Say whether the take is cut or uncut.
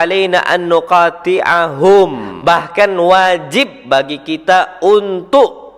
cut